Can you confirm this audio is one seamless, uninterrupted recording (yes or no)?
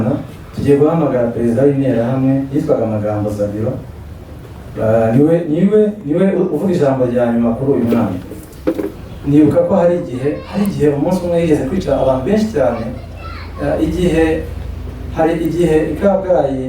no